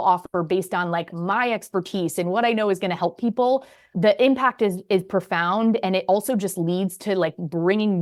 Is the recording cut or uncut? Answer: uncut